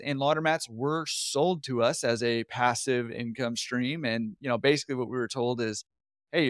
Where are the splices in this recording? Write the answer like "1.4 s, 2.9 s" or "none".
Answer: none